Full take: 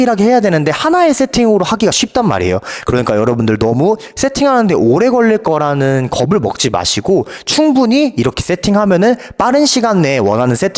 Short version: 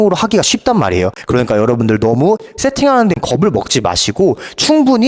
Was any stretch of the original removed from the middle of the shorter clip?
yes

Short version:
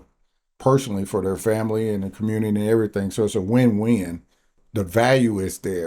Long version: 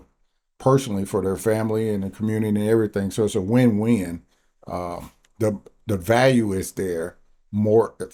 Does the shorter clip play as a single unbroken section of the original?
no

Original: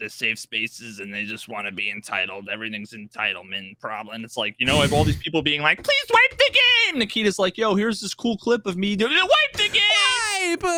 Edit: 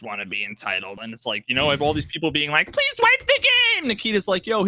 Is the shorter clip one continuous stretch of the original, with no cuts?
no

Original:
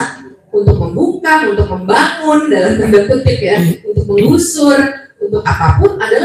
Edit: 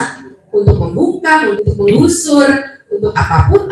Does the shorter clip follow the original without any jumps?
no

